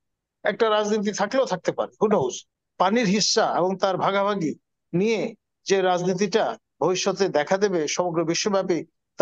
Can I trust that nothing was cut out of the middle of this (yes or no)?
no